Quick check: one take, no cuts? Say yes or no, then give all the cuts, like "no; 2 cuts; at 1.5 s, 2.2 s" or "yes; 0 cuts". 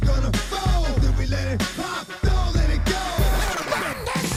yes; 0 cuts